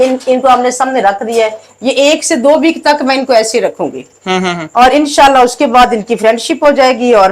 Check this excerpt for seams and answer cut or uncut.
uncut